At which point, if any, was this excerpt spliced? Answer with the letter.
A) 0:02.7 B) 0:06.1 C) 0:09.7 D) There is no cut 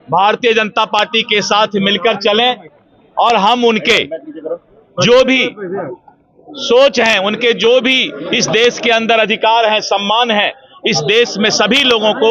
D